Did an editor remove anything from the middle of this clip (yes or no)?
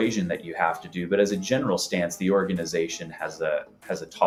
no